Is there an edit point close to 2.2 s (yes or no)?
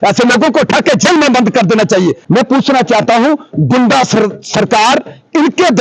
yes